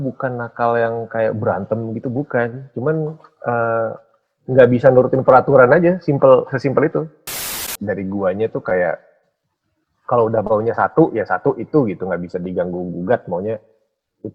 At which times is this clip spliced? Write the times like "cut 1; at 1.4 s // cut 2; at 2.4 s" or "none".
cut 1; at 7.7 s